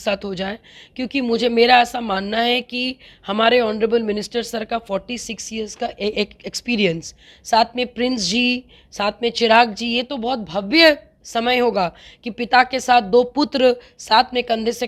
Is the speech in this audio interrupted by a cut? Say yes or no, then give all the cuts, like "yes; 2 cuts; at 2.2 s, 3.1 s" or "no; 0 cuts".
no; 0 cuts